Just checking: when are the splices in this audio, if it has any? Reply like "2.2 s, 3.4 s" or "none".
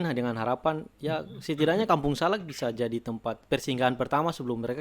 3.4 s